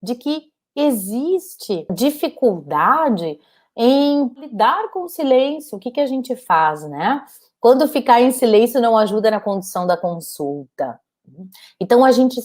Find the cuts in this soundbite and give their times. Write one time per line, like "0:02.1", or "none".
0:01.9
0:04.4